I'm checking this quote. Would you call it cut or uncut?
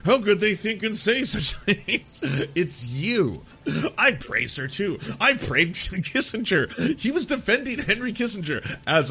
cut